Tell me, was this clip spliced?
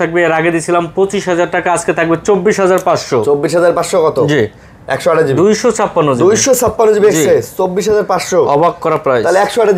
no; 0 cuts

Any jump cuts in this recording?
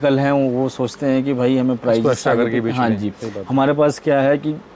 no; 0 cuts

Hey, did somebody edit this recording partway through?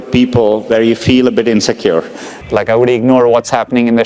yes; 1 cut; at 2.3 s

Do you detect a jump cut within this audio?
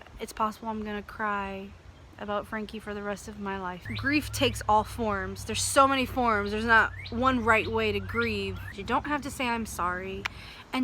yes; 2 cuts; at 3.8 s, 8.7 s

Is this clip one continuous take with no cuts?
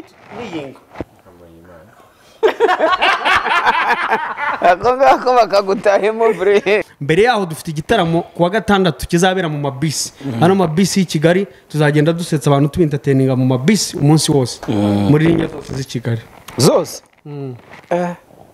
no; 1 cut; at 6.9 s

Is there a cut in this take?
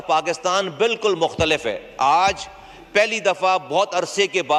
no; 0 cuts

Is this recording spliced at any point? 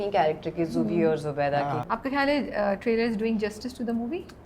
yes; 1 cut; at 1.8 s

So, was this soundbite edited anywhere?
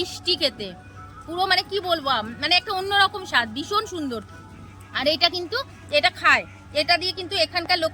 no; 0 cuts

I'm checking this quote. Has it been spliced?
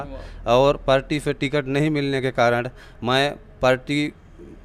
no; 0 cuts

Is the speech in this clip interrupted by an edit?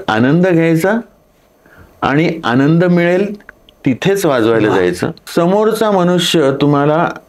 yes; 1 cut; at 5.2 s

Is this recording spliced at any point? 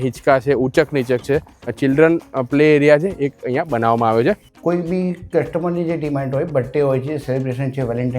yes; 2 cuts; at 1.7 s, 4.5 s

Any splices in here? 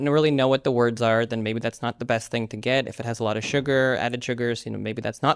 no; 0 cuts

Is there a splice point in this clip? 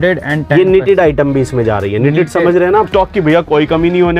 yes; 1 cut; at 2.9 s

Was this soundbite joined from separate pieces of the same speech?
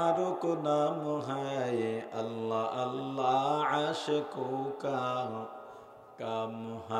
no; 0 cuts

